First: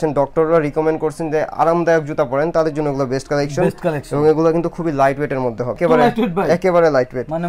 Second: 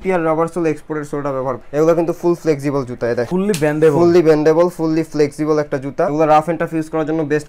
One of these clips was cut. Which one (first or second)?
second